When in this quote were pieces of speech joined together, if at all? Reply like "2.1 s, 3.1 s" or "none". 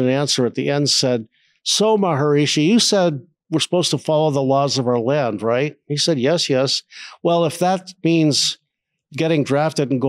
none